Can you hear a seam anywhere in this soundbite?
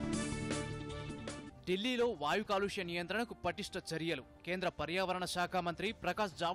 yes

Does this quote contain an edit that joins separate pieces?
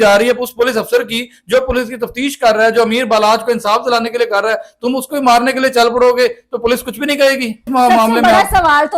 yes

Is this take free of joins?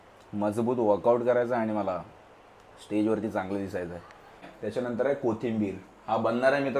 no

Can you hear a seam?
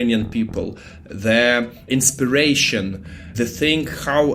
yes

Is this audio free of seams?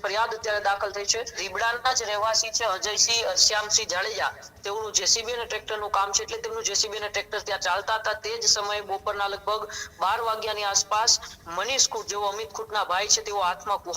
no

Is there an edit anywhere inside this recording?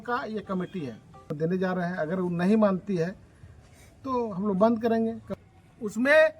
yes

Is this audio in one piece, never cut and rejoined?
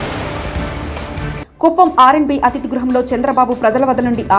no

